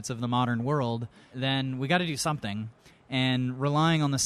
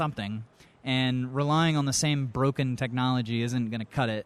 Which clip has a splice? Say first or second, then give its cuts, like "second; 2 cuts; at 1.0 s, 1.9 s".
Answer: first; 1 cut; at 1.3 s